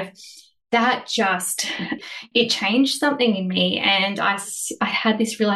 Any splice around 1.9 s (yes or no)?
yes